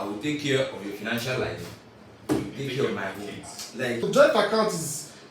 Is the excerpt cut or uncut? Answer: cut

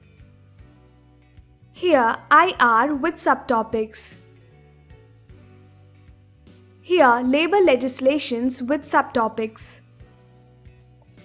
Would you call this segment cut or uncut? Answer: cut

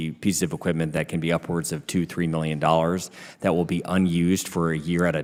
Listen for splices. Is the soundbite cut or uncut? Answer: uncut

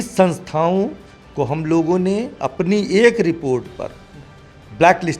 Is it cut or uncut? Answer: uncut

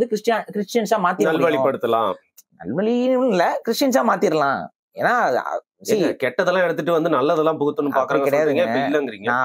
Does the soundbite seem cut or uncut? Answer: uncut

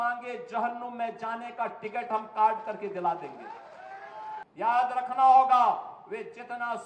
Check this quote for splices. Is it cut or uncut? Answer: cut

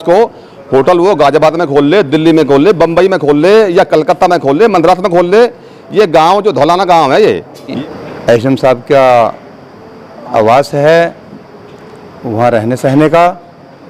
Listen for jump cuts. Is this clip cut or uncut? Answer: cut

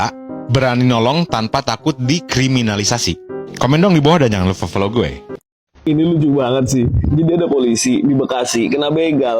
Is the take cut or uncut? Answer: uncut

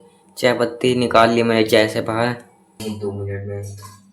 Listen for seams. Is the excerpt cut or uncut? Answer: cut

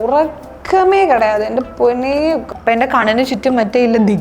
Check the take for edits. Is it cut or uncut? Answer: cut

